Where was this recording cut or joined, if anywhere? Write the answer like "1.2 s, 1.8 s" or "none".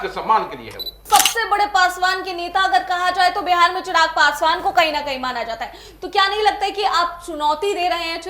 0.9 s